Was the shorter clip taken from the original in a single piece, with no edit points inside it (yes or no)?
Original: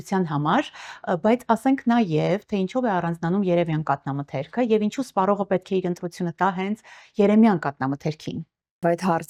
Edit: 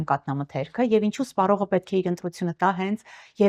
yes